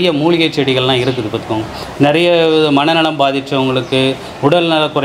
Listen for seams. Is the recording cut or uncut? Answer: uncut